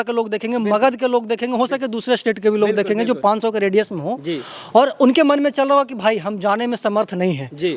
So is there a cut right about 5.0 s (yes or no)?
no